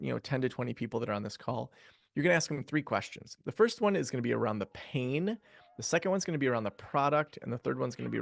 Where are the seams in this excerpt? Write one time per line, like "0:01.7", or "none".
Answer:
none